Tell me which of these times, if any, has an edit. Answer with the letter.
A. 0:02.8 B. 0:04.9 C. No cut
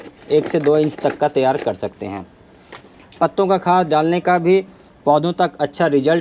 A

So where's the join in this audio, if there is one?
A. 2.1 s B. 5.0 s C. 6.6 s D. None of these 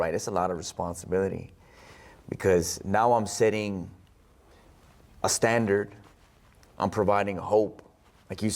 D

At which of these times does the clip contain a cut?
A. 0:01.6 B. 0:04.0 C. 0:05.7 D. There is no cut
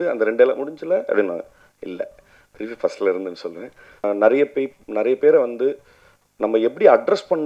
B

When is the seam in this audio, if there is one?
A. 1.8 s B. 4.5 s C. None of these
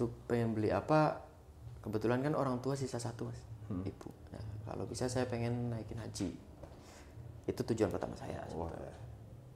C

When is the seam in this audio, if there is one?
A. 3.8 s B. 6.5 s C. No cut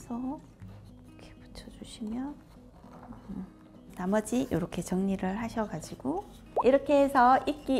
A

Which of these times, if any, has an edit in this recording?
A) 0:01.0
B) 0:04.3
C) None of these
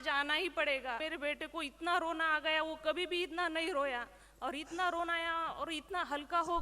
A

